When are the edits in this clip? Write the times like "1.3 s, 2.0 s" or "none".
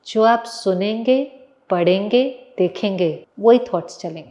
3.3 s